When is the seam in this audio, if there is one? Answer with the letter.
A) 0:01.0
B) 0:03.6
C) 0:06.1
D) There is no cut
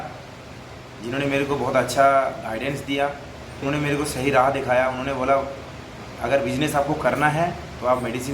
B